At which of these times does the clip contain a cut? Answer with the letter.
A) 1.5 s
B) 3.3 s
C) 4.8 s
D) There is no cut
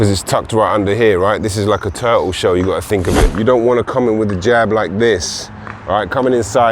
B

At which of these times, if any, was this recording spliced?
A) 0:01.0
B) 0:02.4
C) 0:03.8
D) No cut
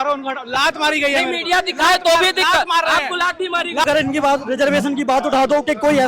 C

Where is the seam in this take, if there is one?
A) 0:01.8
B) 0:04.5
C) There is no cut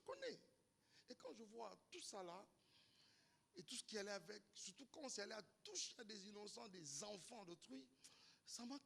C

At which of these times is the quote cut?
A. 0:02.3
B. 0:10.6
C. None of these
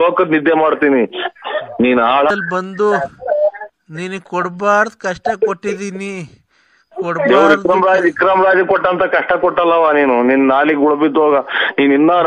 A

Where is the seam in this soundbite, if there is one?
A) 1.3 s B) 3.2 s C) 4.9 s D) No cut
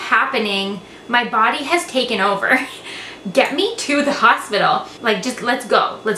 C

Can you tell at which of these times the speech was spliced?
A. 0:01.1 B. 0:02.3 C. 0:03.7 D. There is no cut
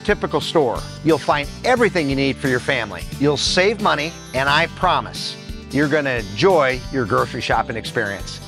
D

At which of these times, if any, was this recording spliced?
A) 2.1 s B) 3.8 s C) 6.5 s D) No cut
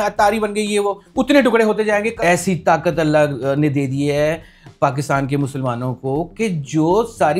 A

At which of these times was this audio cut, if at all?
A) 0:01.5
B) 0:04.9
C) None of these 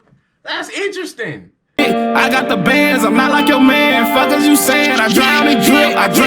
A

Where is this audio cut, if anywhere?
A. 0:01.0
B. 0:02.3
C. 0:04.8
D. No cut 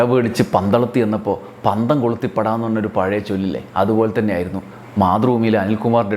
D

